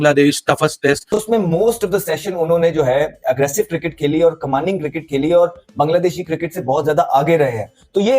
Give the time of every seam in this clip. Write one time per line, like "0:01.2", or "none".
0:01.0

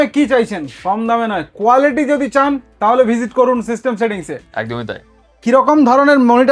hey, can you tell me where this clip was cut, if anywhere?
none

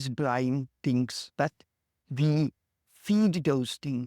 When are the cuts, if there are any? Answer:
0:01.2

